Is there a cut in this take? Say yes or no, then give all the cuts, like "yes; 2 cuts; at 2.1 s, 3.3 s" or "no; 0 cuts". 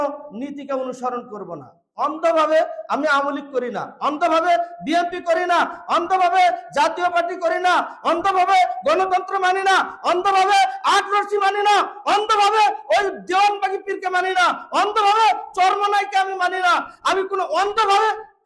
no; 0 cuts